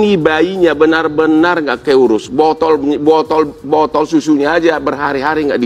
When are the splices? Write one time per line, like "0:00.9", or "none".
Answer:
none